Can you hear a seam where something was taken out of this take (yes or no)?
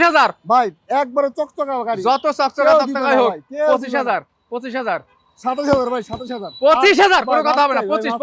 no